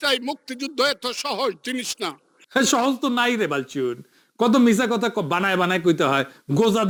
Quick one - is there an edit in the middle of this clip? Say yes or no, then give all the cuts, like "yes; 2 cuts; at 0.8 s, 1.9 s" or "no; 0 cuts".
no; 0 cuts